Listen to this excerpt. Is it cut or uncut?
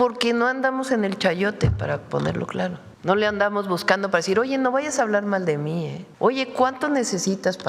cut